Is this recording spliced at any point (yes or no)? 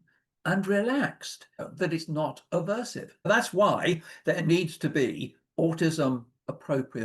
yes